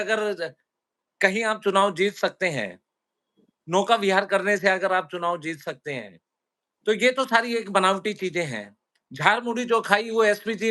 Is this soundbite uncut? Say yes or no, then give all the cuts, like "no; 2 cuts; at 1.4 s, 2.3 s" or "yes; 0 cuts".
yes; 0 cuts